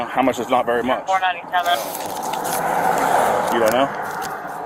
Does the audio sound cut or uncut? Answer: uncut